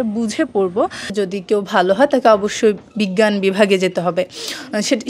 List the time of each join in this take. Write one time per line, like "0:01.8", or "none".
0:01.1